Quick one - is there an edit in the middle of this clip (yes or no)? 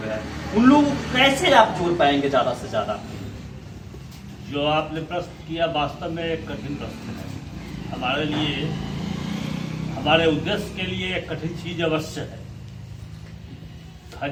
no